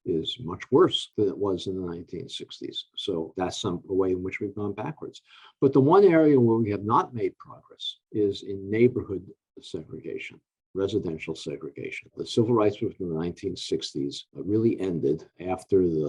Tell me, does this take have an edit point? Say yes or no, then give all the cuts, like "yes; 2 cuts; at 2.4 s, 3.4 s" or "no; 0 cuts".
no; 0 cuts